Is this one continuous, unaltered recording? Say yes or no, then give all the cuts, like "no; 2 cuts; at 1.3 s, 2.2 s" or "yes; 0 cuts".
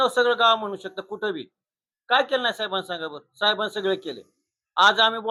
yes; 0 cuts